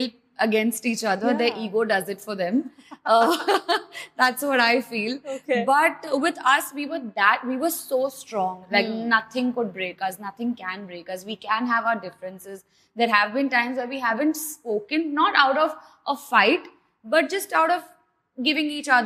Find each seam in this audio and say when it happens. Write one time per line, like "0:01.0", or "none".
none